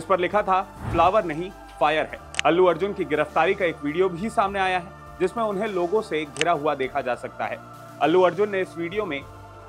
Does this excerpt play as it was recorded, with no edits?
yes; 0 cuts

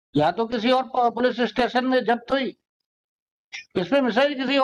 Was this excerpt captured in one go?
yes; 0 cuts

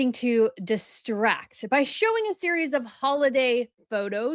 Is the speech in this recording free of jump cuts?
yes; 0 cuts

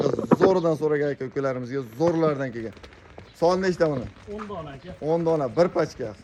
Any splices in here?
no; 0 cuts

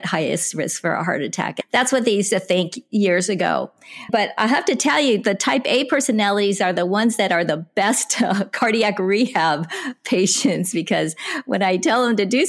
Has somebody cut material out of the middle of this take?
yes; 2 cuts; at 1.5 s, 4.1 s

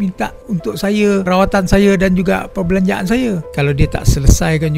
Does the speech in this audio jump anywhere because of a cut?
yes; 1 cut; at 3.5 s

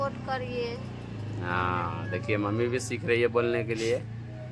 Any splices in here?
no; 0 cuts

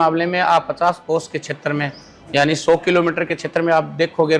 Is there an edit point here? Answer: yes; 1 cut; at 1.0 s

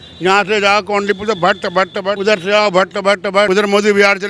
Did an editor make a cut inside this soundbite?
yes; 2 cuts; at 2.2 s, 3.5 s

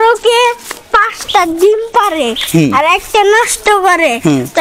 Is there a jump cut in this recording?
no; 0 cuts

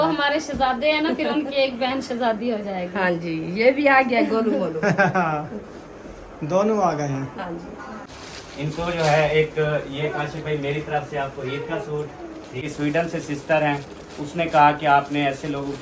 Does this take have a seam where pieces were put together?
yes; 2 cuts; at 8.1 s, 12.7 s

